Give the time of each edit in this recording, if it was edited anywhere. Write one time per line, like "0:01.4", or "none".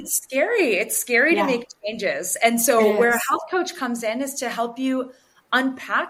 none